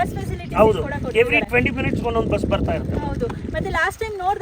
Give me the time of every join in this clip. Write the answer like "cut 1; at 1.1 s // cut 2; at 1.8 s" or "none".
none